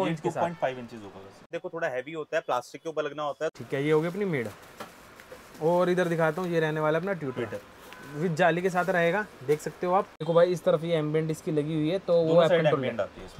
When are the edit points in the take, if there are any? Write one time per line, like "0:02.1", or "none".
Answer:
0:01.5
0:03.5
0:10.2